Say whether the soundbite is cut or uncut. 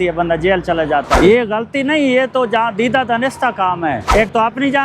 cut